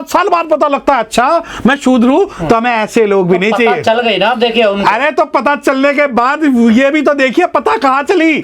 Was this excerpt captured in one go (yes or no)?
yes